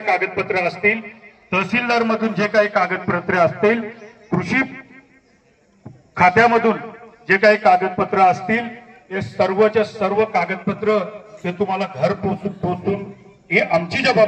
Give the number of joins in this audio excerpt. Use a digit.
0